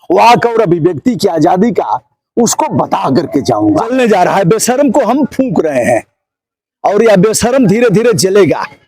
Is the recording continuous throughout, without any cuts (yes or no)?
no